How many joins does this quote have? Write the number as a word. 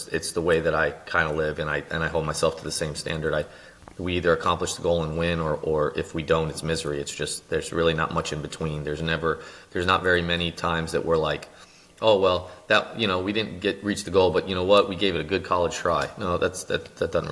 zero